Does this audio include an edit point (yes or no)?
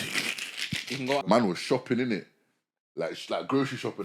yes